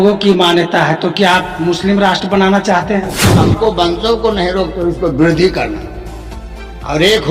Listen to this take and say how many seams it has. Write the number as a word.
one